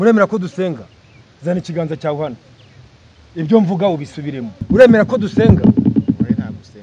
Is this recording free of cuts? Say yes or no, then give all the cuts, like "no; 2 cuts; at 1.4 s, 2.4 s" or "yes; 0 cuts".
no; 1 cut; at 4.5 s